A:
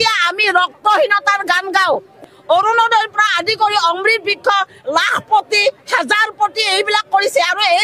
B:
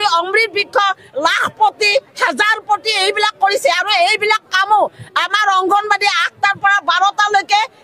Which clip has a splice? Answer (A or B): A